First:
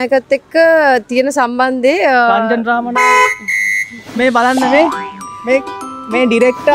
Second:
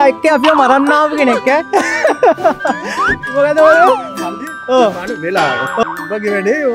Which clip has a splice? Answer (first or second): second